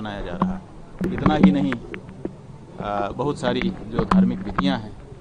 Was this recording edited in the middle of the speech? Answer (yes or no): yes